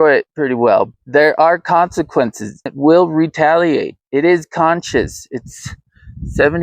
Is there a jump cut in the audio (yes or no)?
yes